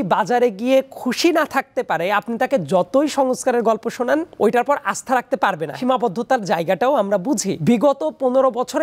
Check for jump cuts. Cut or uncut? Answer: cut